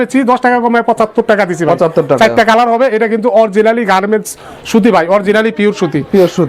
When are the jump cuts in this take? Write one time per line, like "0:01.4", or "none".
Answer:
none